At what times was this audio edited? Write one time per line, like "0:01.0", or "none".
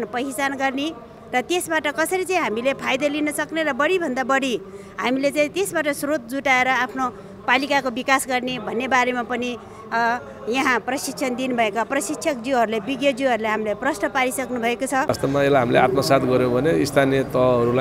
0:15.2

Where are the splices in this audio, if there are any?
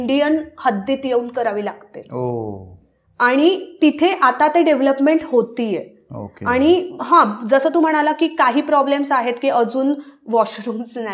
none

